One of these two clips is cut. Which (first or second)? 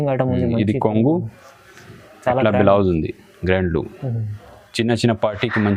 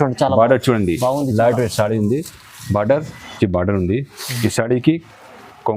second